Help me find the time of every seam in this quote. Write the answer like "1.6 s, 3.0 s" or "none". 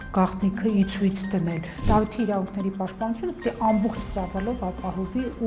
1.7 s